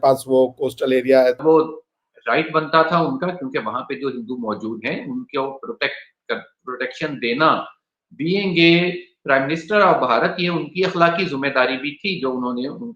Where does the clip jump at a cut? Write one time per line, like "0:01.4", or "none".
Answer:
0:01.4